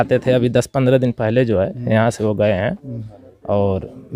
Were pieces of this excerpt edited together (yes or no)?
no